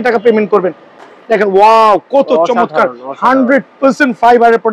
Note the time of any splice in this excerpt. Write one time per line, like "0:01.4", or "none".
0:00.9

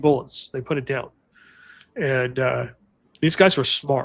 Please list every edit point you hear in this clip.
none

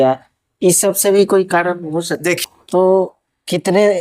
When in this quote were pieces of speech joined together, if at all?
0:02.2

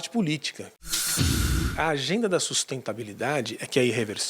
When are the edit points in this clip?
0:01.2

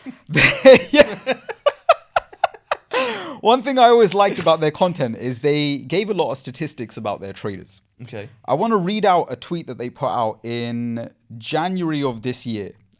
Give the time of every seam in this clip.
none

